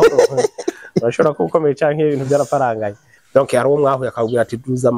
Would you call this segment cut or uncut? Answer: cut